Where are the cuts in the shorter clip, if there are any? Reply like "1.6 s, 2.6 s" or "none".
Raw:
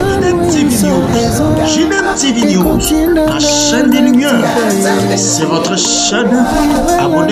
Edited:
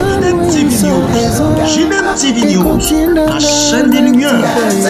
none